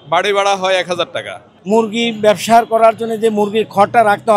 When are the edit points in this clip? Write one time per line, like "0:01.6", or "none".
0:01.5